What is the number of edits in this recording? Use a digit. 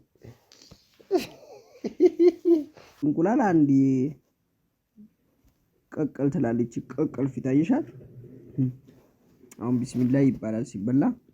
1